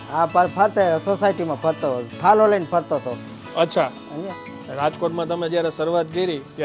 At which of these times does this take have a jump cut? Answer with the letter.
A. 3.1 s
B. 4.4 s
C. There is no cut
B